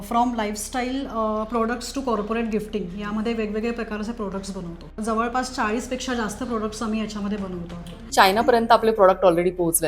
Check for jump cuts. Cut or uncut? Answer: cut